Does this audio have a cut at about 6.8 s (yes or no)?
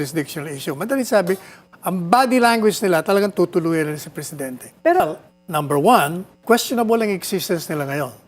no